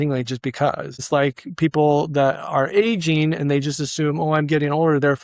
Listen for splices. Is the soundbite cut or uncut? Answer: cut